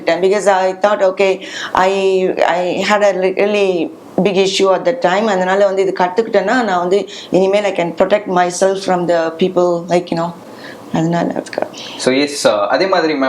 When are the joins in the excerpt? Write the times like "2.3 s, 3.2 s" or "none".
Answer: none